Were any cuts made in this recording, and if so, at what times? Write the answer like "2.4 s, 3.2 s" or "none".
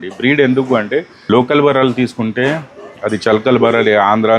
1.1 s